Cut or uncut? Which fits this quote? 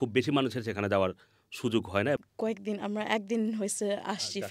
cut